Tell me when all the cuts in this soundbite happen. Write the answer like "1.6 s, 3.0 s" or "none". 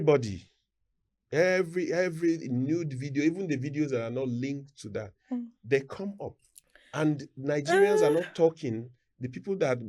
none